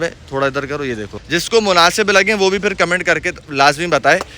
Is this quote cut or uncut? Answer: cut